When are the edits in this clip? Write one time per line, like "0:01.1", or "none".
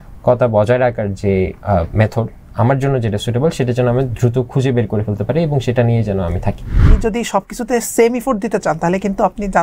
0:06.9